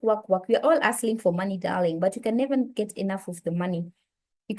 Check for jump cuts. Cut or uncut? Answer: uncut